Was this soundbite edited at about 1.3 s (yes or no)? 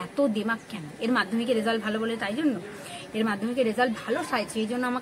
no